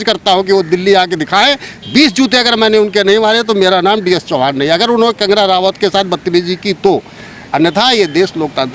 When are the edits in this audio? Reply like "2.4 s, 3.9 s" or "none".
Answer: none